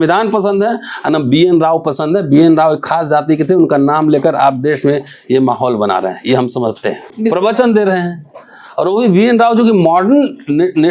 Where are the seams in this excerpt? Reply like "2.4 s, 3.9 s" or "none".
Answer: 7.1 s